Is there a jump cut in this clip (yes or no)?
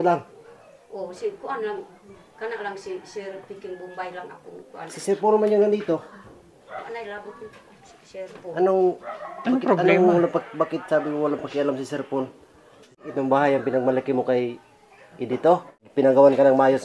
yes